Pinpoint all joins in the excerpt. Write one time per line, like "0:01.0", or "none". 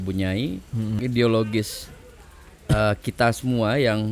0:01.0